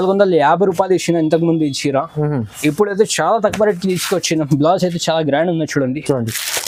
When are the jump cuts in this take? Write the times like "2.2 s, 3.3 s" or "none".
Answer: none